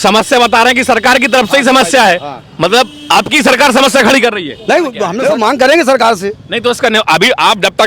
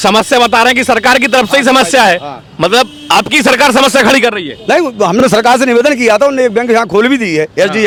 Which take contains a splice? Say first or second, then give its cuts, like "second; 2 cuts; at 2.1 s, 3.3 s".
first; 1 cut; at 5.1 s